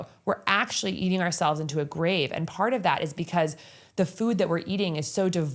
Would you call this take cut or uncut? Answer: uncut